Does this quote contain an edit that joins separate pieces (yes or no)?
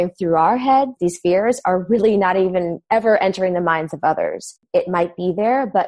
yes